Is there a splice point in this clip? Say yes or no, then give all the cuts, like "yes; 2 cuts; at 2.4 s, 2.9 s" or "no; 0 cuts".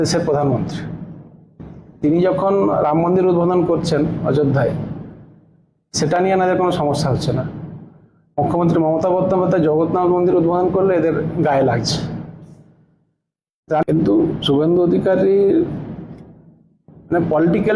yes; 1 cut; at 13.8 s